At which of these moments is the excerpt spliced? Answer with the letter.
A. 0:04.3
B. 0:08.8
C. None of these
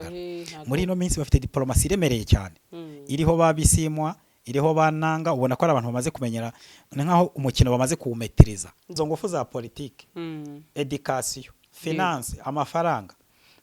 B